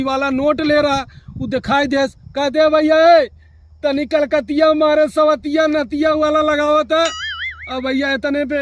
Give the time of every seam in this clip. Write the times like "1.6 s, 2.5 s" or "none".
none